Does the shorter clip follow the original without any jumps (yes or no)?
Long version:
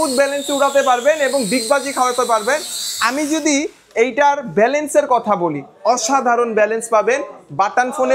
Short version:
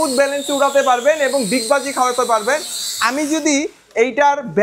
yes